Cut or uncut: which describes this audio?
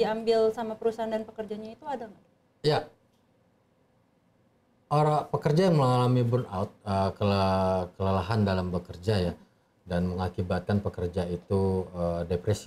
uncut